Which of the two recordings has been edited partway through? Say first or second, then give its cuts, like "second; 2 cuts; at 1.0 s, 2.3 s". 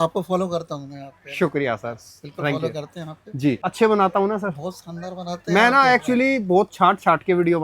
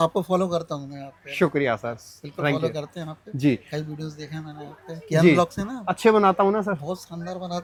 first; 1 cut; at 3.6 s